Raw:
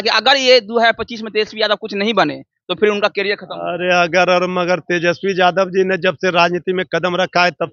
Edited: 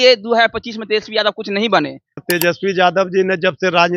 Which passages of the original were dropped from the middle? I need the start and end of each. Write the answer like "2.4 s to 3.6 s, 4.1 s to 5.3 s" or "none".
2.7 s to 4.8 s